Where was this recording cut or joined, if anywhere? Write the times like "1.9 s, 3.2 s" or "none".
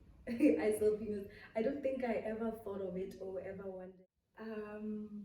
3.9 s